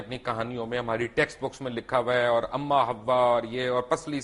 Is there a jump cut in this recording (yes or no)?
no